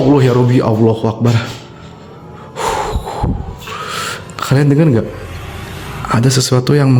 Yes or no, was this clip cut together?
no